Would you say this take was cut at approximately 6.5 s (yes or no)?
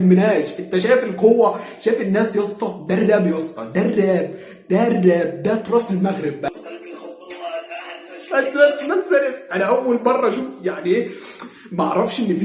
yes